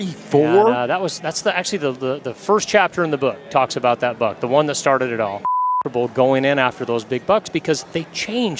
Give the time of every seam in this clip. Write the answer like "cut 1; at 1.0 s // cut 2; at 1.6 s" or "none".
cut 1; at 5.8 s